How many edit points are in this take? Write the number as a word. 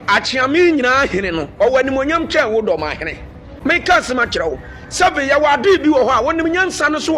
one